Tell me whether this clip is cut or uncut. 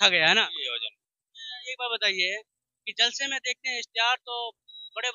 uncut